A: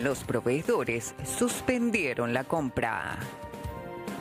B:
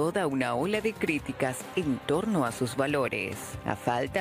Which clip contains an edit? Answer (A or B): A